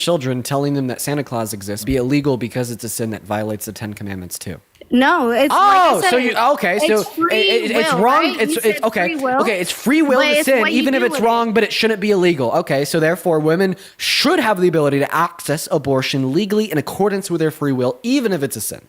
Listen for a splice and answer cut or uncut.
cut